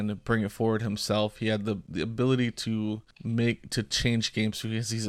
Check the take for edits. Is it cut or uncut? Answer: cut